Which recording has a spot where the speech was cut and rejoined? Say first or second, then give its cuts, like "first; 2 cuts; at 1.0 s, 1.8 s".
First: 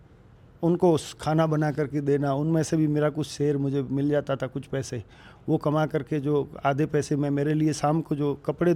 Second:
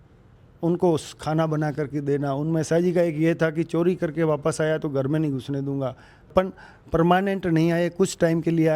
second; 2 cuts; at 2.7 s, 6.3 s